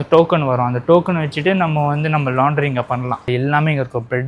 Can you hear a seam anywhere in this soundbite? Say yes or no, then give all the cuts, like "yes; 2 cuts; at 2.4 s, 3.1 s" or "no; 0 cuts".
yes; 1 cut; at 3.3 s